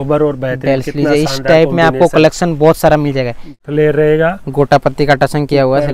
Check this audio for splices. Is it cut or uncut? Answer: cut